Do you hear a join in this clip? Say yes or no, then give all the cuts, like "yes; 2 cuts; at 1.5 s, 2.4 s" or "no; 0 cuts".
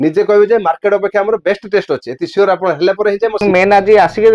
yes; 1 cut; at 3.4 s